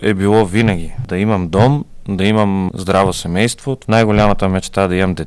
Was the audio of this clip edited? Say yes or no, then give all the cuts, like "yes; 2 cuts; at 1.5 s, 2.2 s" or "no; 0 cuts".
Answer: yes; 3 cuts; at 1.0 s, 2.7 s, 3.7 s